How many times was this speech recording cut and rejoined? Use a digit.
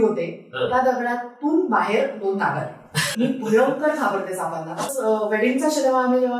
2